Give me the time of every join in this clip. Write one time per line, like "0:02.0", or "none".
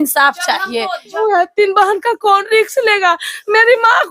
0:01.2